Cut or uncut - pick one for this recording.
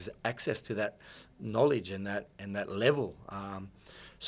uncut